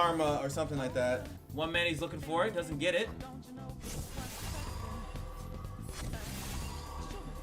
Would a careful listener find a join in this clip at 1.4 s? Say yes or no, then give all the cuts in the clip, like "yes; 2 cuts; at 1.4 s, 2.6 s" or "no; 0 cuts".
yes; 1 cut; at 1.4 s